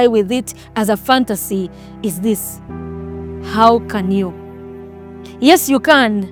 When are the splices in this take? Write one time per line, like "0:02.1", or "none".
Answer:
none